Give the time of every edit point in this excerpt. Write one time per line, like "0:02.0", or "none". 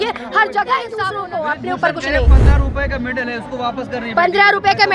0:01.1